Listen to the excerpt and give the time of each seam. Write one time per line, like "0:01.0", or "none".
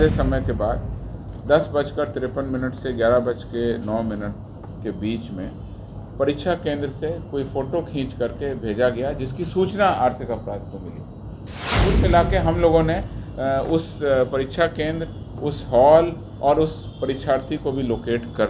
0:11.8

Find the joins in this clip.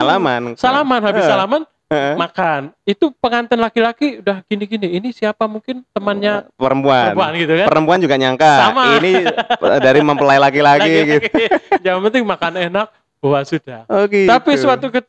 none

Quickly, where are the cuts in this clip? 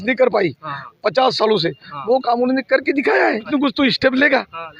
0:03.5

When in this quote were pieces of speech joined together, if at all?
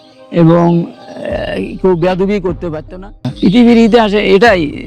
0:03.3

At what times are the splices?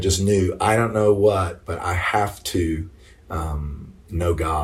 none

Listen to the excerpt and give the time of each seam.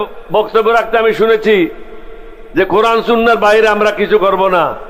none

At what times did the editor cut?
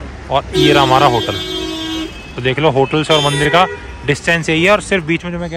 none

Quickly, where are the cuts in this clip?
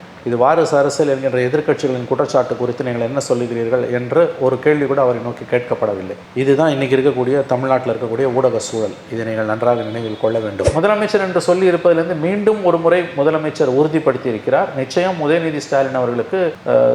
0:10.6

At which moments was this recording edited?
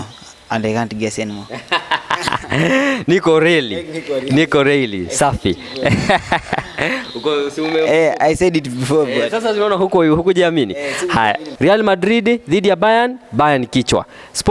0:11.5

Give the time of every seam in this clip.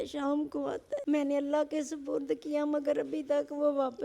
0:01.0

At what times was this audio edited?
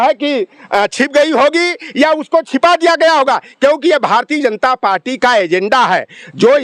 none

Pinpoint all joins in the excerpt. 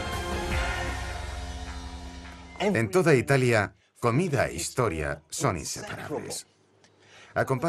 none

